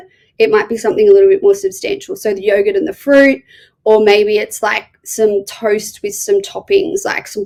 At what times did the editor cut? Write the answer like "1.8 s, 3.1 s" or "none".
none